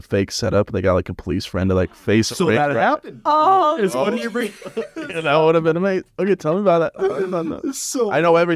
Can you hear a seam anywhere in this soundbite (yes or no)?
no